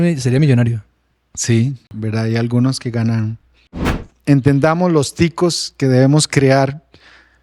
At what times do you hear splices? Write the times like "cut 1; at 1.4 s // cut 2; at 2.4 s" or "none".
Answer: cut 1; at 1.8 s // cut 2; at 4.0 s